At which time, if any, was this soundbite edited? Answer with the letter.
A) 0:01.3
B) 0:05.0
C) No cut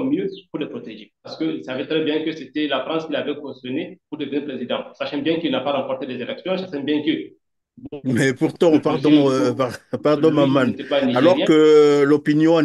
A